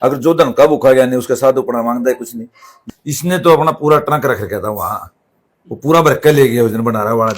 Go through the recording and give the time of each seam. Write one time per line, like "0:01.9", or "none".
0:02.8